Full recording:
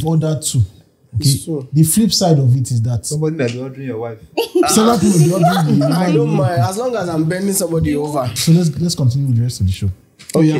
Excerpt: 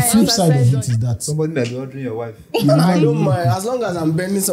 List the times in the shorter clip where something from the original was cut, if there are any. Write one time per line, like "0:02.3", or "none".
0:02.6